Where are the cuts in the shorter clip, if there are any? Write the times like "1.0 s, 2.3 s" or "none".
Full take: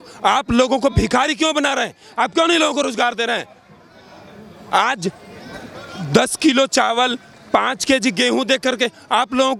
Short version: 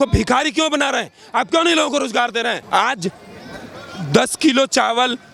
2.6 s

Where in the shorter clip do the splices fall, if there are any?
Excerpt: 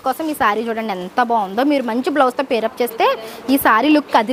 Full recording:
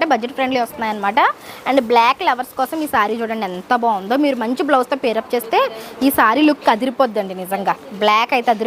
none

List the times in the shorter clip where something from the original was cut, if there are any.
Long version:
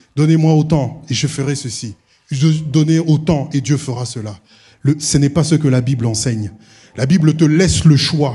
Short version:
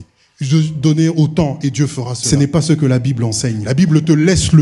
2.2 s, 3.6 s

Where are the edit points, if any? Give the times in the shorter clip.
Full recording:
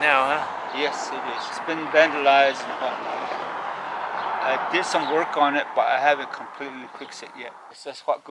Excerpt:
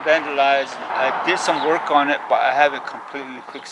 0.9 s

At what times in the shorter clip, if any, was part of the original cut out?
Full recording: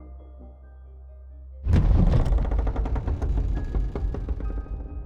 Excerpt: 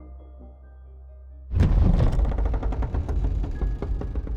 1.3 s

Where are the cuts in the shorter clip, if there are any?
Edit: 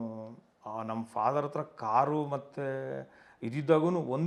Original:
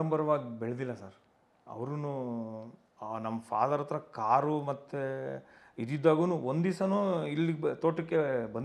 none

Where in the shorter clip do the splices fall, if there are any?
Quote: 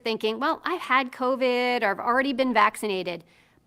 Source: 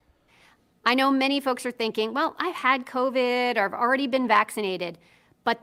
none

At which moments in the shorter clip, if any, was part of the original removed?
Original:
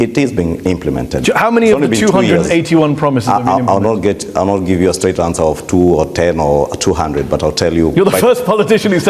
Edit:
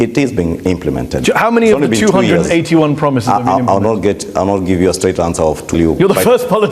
5.7 s

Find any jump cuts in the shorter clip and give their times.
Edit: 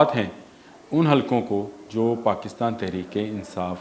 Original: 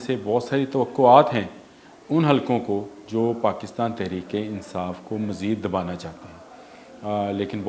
none

